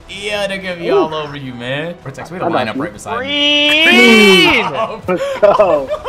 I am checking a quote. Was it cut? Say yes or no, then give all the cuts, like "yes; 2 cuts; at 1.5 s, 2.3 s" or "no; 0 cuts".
yes; 1 cut; at 2.0 s